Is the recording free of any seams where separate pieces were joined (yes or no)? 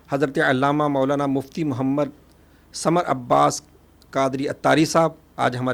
yes